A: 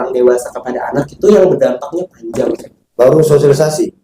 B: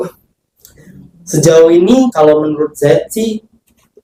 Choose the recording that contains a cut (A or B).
A